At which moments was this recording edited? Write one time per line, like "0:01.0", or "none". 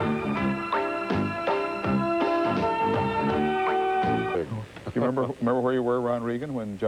none

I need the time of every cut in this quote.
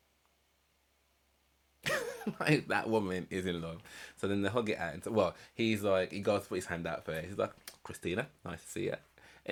none

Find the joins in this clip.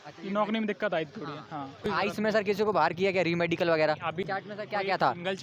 0:01.9
0:04.2

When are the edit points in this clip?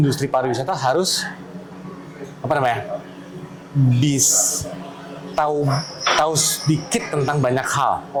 none

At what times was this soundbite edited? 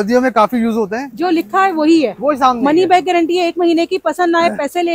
0:01.0

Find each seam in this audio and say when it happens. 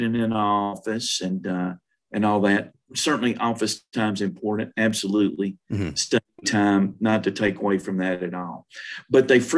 none

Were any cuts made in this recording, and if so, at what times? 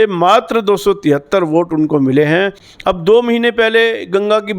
0:02.6

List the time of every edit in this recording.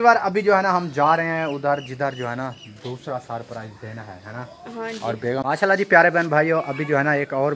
0:05.4

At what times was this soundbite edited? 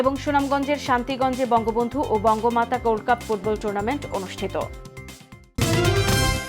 0:05.6

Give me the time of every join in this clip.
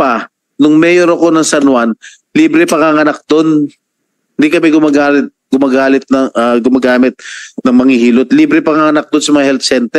none

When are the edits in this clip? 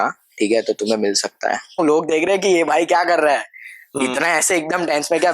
0:01.8

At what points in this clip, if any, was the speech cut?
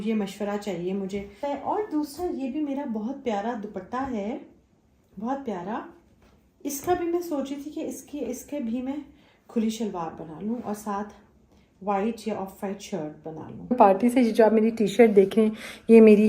0:01.4
0:13.8

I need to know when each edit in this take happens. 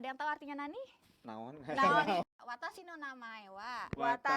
0:02.2

